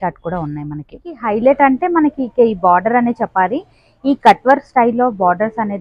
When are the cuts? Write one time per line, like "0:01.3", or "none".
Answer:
0:01.2